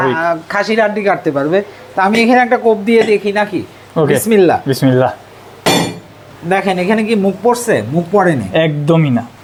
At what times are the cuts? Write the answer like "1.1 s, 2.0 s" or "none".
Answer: none